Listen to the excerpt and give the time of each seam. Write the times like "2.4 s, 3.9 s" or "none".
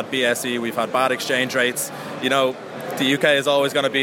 none